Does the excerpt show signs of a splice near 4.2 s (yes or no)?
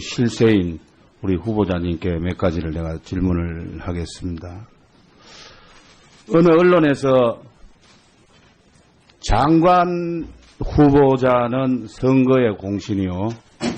no